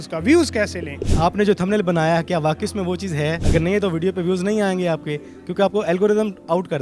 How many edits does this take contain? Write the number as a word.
one